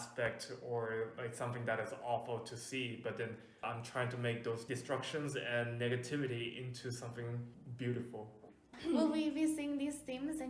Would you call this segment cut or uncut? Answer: cut